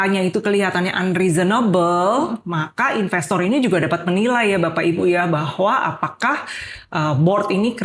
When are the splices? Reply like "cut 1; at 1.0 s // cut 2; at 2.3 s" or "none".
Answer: none